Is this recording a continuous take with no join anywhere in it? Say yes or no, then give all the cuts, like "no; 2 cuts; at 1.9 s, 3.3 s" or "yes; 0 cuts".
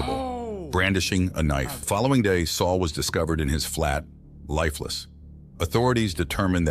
no; 1 cut; at 1.9 s